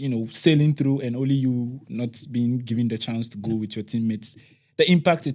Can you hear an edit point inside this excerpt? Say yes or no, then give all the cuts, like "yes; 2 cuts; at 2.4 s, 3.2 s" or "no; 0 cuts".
no; 0 cuts